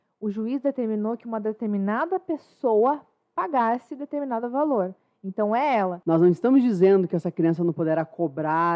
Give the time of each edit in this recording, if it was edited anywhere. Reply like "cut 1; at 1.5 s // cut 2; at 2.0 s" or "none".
cut 1; at 6.0 s